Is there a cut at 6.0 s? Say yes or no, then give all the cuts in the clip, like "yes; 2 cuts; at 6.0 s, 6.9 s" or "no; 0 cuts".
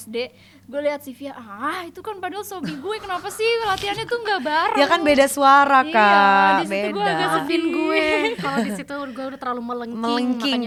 no; 0 cuts